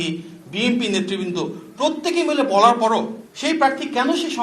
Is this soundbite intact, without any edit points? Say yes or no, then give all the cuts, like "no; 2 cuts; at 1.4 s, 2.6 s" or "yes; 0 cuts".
no; 1 cut; at 3.2 s